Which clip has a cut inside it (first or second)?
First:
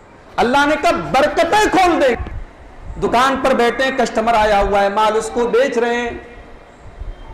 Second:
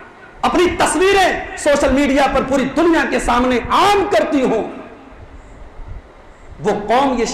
first